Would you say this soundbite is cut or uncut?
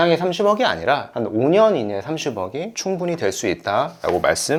uncut